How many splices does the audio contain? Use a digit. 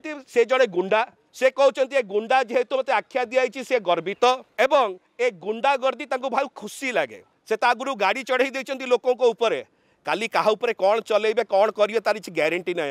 3